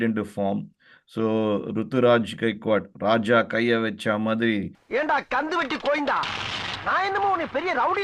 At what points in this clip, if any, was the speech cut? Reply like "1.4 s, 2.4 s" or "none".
4.7 s